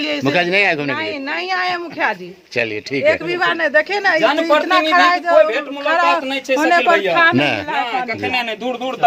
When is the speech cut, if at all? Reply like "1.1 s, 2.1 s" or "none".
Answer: none